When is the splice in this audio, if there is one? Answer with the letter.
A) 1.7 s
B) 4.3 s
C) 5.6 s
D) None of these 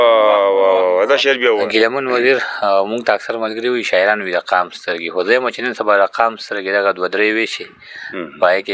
A